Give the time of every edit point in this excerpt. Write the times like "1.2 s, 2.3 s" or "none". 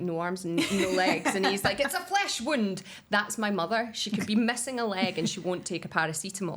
none